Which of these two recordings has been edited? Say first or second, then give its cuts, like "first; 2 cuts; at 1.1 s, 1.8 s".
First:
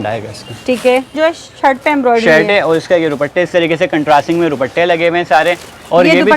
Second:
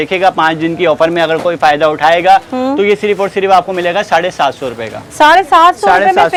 first; 1 cut; at 1.1 s